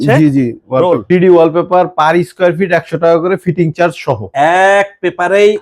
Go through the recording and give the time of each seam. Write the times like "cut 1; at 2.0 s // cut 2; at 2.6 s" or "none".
cut 1; at 1.0 s // cut 2; at 4.3 s